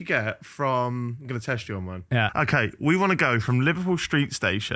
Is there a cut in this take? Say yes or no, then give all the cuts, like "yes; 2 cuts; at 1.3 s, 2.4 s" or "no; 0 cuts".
yes; 1 cut; at 2.3 s